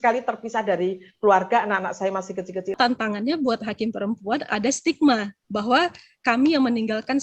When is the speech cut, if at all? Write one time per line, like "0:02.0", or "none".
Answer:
0:02.8